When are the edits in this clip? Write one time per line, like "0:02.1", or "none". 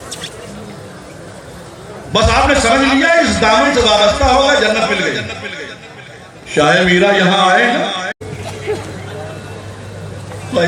0:08.2